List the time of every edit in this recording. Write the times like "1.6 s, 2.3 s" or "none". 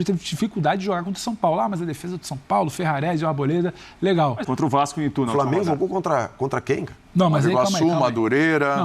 4.4 s